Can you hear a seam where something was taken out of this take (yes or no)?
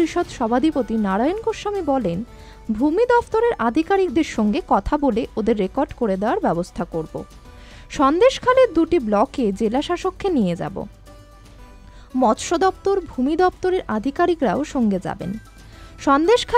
no